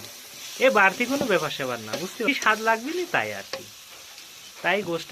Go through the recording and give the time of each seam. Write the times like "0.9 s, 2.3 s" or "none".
2.3 s